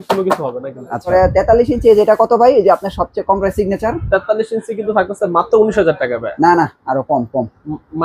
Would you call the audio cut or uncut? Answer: cut